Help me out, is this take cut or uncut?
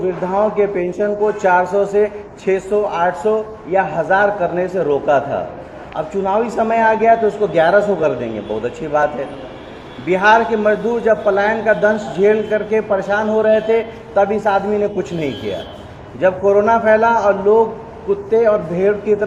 uncut